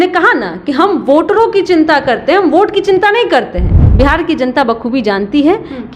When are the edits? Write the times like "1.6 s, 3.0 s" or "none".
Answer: 3.8 s